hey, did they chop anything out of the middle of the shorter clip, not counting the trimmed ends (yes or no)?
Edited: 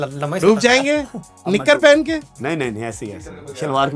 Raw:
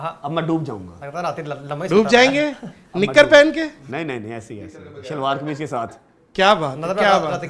no